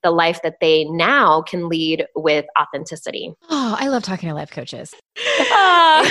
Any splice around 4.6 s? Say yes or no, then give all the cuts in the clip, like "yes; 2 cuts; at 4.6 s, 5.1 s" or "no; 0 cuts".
yes; 2 cuts; at 3.3 s, 4.6 s